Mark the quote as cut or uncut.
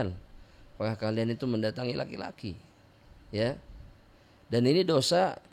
uncut